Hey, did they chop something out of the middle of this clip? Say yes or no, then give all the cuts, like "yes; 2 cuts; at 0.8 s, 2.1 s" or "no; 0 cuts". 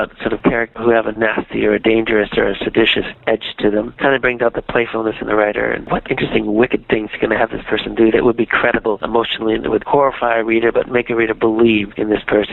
no; 0 cuts